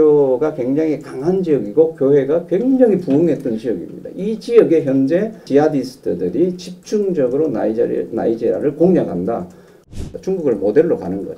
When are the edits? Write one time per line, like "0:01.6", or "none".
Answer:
0:09.9